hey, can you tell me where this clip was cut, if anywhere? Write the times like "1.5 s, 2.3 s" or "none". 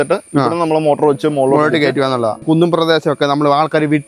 2.4 s